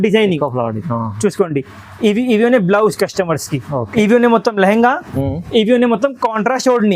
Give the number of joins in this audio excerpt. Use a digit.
1